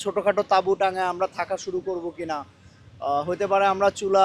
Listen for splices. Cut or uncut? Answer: uncut